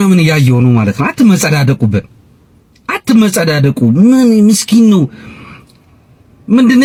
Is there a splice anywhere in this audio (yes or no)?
no